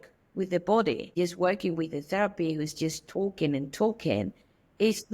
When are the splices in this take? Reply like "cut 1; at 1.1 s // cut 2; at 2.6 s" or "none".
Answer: cut 1; at 1.1 s